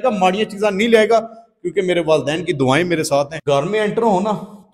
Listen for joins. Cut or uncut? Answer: cut